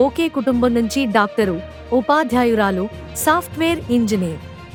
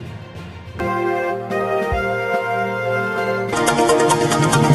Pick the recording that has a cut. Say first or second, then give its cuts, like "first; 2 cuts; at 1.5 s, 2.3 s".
second; 2 cuts; at 0.8 s, 3.5 s